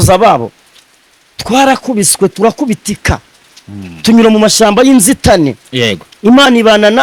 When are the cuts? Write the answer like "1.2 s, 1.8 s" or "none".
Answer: none